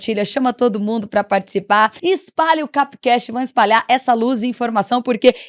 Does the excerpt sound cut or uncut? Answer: cut